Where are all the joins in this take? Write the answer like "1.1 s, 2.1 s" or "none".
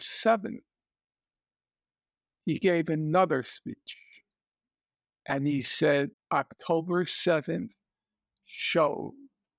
6.2 s